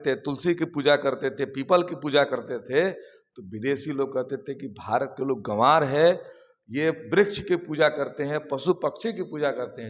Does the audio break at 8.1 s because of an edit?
no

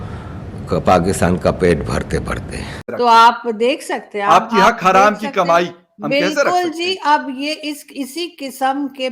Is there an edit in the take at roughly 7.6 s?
no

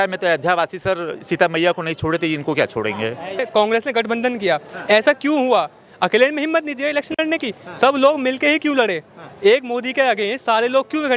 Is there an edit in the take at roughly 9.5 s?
no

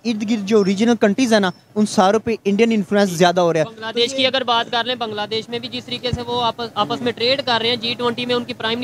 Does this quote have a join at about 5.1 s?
no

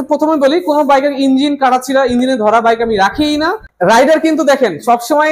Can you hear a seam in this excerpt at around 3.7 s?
yes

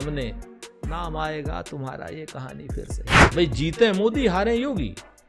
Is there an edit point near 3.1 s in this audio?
yes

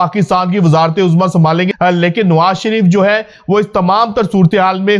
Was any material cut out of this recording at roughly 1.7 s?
yes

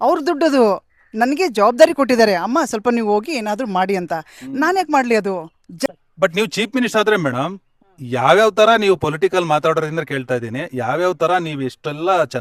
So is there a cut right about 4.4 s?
no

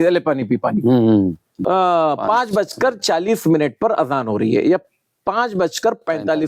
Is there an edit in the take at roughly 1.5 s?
yes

